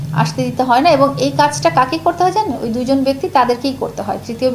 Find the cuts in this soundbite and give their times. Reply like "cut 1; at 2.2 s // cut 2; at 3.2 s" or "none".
none